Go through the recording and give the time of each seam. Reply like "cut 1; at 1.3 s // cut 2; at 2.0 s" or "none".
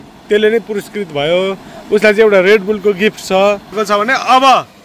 cut 1; at 3.7 s

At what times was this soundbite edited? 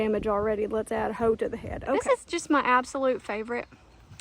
cut 1; at 2.0 s

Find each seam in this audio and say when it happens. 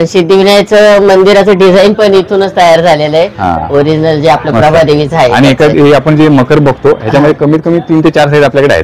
none

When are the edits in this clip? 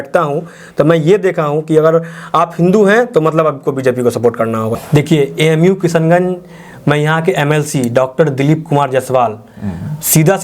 cut 1; at 4.7 s

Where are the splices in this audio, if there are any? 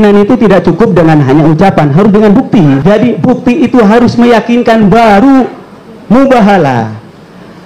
cut 1; at 2.8 s

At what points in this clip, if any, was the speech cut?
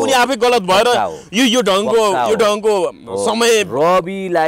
none

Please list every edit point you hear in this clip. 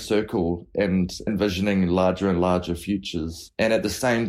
cut 1; at 1.3 s

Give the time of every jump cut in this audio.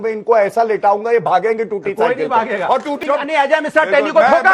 cut 1; at 3.0 s

